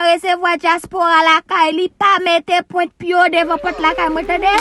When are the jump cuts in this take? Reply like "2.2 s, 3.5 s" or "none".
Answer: none